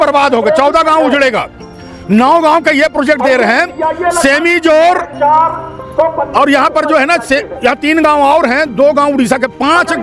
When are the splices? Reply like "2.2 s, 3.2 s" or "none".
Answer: none